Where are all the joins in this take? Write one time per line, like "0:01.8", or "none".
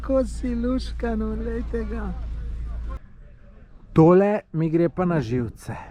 0:03.0